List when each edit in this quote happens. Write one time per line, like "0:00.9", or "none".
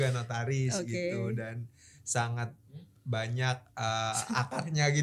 none